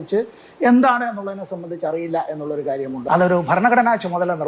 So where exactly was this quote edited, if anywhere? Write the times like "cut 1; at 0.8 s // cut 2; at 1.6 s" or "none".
cut 1; at 3.0 s